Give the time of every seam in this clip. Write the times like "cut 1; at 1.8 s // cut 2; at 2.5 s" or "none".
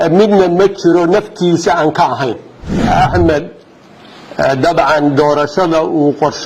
cut 1; at 2.9 s